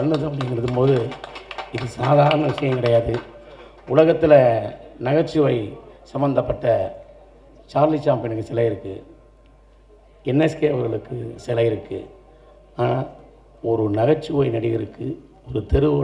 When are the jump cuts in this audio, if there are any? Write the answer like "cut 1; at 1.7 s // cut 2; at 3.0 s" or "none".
none